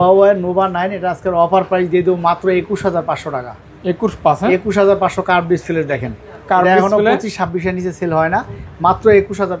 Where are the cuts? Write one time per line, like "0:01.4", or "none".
none